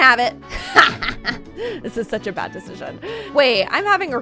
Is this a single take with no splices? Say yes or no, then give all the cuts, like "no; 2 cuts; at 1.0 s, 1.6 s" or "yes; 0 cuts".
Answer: no; 1 cut; at 3.3 s